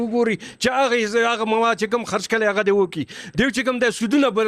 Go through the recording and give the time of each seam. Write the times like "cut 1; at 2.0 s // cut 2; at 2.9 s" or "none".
none